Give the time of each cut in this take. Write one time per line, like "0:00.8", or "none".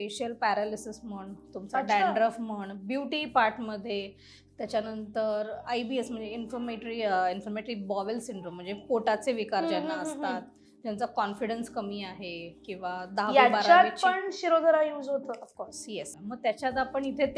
0:16.2